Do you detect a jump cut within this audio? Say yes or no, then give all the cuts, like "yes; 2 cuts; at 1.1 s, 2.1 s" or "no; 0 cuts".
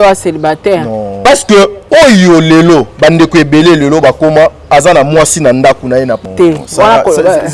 yes; 3 cuts; at 1.1 s, 1.8 s, 6.2 s